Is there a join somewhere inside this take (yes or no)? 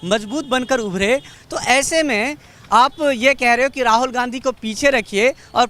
yes